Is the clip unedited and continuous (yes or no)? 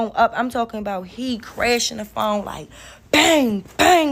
yes